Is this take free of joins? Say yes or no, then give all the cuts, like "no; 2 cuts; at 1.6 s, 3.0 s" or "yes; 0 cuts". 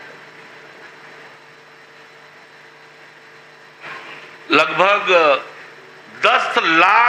yes; 0 cuts